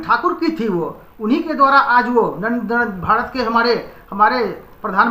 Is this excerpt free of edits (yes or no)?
yes